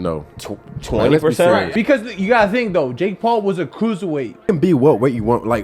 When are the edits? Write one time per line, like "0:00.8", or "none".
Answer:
0:01.7
0:04.4